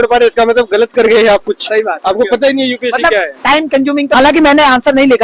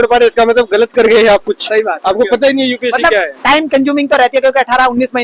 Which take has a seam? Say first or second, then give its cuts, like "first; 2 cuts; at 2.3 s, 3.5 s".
first; 1 cut; at 4.1 s